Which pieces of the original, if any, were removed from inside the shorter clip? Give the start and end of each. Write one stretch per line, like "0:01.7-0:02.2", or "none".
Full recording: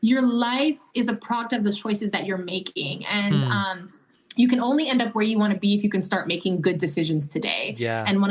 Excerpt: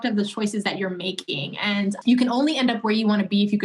0:03.4-0:04.3